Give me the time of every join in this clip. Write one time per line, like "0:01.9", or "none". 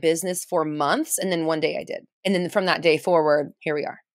none